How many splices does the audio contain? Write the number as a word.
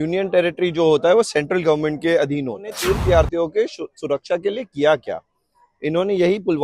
one